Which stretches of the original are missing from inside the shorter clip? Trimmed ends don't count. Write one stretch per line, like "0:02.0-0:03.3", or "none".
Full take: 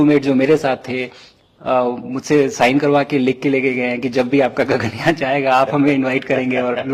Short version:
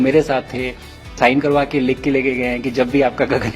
0:01.5-0:02.5